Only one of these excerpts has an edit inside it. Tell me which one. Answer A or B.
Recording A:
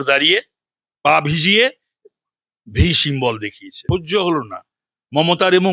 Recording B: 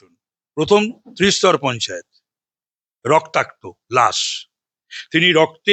A